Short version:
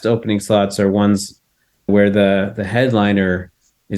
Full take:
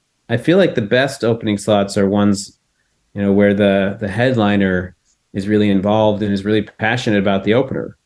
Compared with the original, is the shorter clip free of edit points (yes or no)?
no